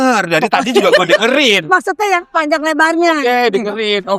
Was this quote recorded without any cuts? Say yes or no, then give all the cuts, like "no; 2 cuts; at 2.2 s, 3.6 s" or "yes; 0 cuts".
yes; 0 cuts